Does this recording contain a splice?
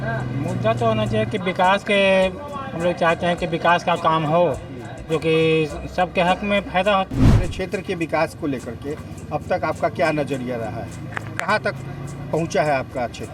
yes; 1 cut; at 7.4 s

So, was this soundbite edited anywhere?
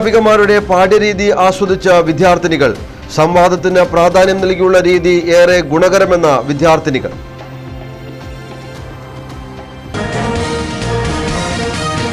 yes; 1 cut; at 9.9 s

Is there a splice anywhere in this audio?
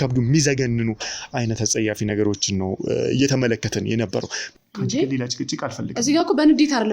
yes; 1 cut; at 4.5 s

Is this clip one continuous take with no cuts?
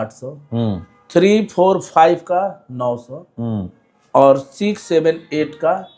yes; 0 cuts

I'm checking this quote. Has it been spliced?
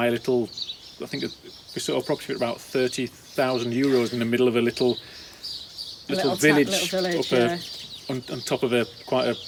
no; 0 cuts

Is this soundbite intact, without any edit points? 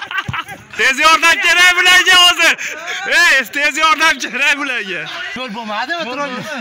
no; 2 cuts; at 0.7 s, 5.2 s

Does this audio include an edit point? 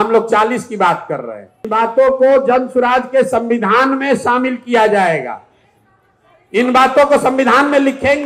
yes; 1 cut; at 1.6 s

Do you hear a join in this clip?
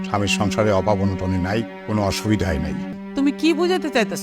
yes; 2 cuts; at 1.8 s, 2.9 s

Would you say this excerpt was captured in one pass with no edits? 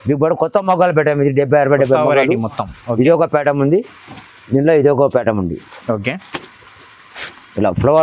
yes; 0 cuts

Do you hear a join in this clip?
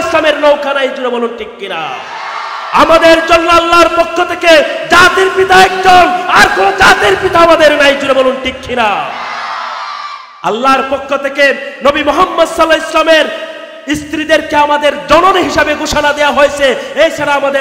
no; 0 cuts

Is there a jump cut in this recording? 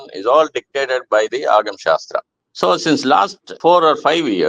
yes; 2 cuts; at 2.3 s, 3.4 s

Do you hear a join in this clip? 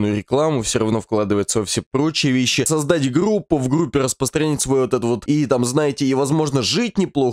yes; 2 cuts; at 2.7 s, 5.2 s

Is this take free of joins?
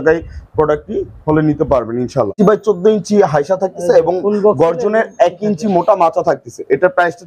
no; 1 cut; at 2.3 s

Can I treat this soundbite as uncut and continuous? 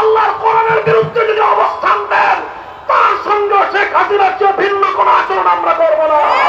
yes; 0 cuts

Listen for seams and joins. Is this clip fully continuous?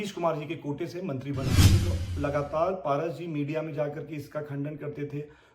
no; 1 cut; at 1.6 s

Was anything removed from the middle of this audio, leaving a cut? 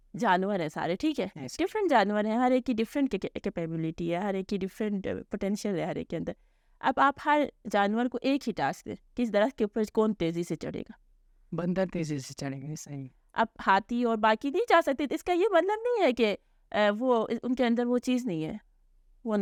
no; 0 cuts

